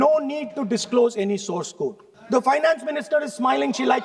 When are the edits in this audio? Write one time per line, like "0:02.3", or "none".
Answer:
0:02.1